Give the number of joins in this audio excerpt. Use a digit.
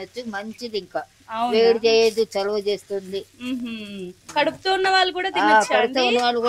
0